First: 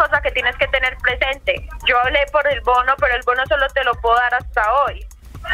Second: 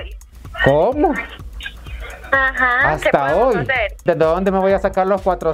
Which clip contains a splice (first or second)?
second